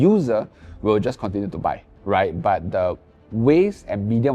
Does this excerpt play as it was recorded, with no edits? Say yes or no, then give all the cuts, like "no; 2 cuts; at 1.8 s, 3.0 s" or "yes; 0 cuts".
yes; 0 cuts